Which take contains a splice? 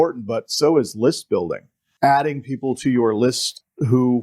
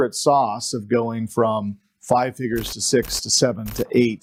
first; 1 cut; at 1.8 s

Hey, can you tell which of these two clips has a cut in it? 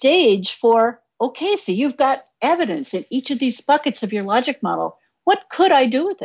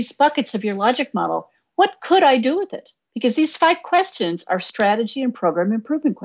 first; 1 cut; at 1.1 s

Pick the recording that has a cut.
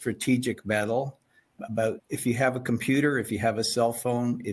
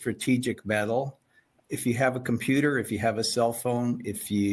second; 1 cut; at 1.6 s

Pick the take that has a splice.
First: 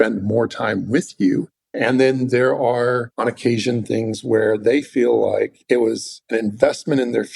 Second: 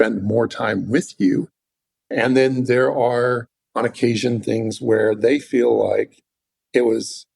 first; 3 cuts; at 1.6 s, 3.1 s, 5.9 s

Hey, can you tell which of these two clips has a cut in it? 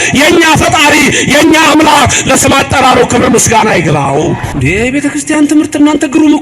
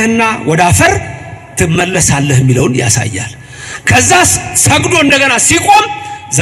first; 1 cut; at 4.5 s

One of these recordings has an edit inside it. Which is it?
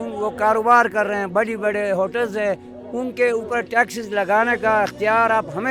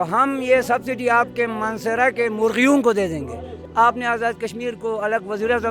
second; 1 cut; at 3.6 s

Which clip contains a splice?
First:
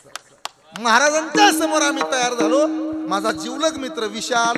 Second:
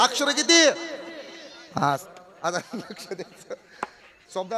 second; 1 cut; at 2.1 s

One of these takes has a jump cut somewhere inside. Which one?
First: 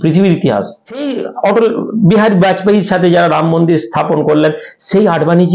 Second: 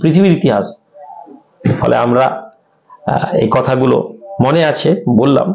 first; 1 cut; at 1.2 s

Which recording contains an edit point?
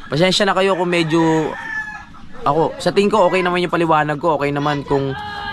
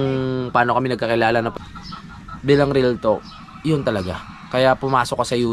second; 1 cut; at 1.5 s

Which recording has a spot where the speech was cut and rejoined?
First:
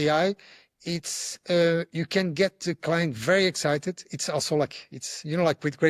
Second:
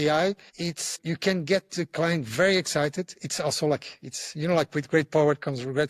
second; 1 cut; at 1.0 s

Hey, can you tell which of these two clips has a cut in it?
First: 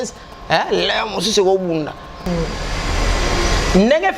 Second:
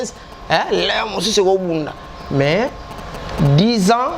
first; 1 cut; at 2.2 s

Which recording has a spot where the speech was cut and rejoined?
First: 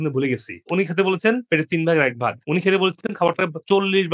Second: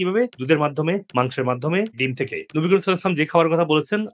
second; 1 cut; at 2.4 s

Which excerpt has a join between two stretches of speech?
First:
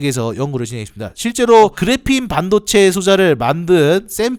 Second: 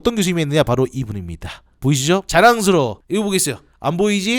second; 1 cut; at 3.0 s

